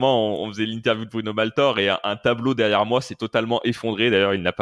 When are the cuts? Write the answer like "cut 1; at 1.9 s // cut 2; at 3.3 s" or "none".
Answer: none